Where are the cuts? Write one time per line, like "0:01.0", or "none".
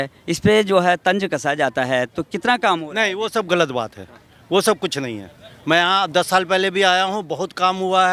none